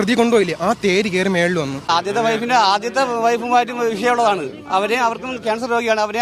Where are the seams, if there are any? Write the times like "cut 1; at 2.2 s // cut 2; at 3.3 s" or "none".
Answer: cut 1; at 1.9 s